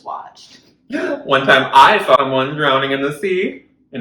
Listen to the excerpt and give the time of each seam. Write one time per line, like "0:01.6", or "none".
0:02.2